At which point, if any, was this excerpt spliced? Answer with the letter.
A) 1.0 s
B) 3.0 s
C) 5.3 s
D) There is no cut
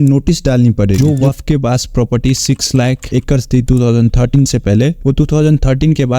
A